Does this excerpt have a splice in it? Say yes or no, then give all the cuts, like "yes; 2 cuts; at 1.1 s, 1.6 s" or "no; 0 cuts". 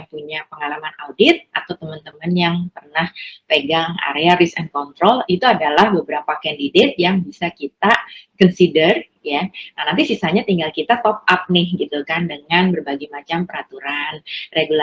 no; 0 cuts